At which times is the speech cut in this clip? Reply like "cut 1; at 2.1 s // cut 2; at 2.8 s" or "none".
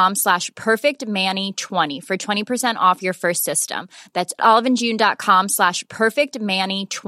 cut 1; at 1.9 s